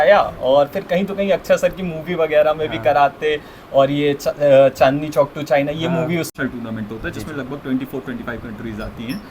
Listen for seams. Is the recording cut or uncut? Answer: cut